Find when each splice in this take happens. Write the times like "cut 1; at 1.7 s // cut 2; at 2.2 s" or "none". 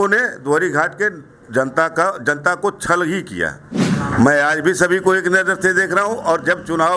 cut 1; at 3.8 s